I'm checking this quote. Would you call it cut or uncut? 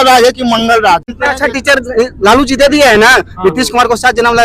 cut